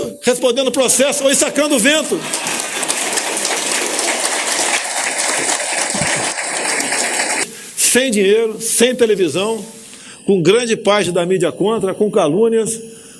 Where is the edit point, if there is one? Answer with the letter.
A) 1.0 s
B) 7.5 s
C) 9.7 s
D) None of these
B